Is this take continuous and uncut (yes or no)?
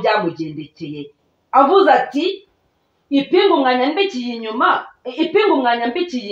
yes